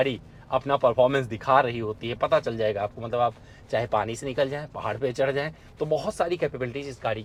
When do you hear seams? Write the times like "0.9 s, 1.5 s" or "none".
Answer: none